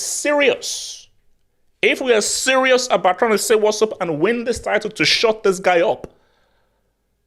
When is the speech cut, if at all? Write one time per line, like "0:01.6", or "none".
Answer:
none